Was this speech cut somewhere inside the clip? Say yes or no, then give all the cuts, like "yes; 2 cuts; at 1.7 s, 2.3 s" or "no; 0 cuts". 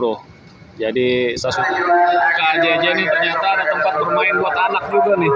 yes; 1 cut; at 1.6 s